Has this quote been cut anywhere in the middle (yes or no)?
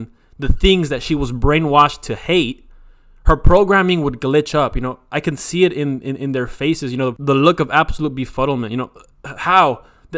yes